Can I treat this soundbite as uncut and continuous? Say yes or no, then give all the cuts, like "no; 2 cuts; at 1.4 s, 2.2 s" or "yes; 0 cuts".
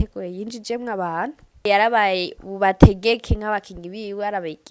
no; 1 cut; at 1.7 s